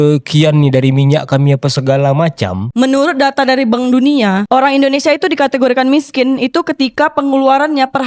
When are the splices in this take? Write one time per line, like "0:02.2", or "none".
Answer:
0:02.7
0:04.4